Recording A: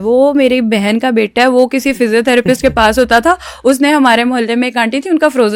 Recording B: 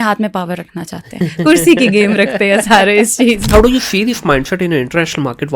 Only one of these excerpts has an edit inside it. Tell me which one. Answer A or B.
B